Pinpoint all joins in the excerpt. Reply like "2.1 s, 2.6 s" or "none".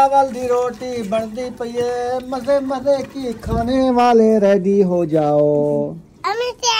none